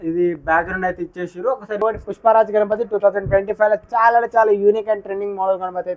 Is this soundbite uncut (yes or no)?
no